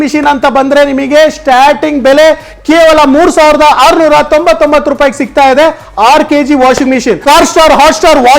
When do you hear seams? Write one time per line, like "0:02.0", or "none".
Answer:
0:07.2